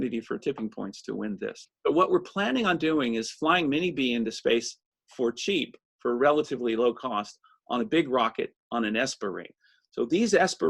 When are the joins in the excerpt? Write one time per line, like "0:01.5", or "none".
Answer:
0:01.7